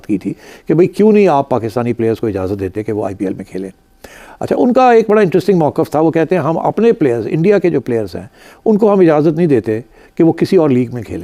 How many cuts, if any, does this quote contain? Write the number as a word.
zero